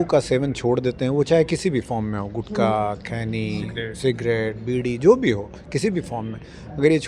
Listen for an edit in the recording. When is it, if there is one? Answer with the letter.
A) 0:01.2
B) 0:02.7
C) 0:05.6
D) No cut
D